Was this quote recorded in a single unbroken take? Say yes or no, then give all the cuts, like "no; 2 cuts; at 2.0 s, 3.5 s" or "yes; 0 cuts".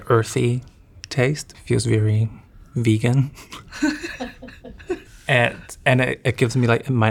no; 1 cut; at 1.5 s